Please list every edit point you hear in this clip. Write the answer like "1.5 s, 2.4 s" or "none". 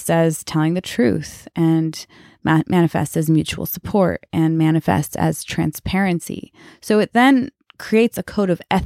7.7 s